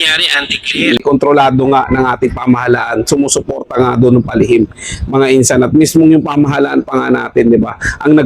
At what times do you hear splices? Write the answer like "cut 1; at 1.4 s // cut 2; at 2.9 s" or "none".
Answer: cut 1; at 1.0 s